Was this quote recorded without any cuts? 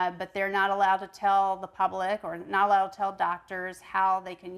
yes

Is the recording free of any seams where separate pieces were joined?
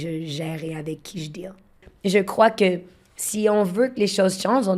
no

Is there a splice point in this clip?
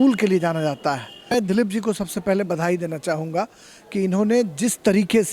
yes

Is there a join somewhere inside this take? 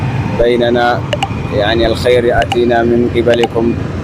no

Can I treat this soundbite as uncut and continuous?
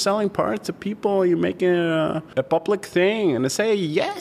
no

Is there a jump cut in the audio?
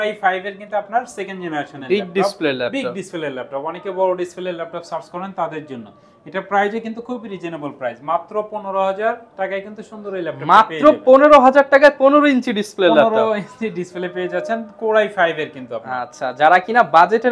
no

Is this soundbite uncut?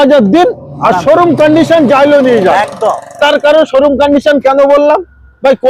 yes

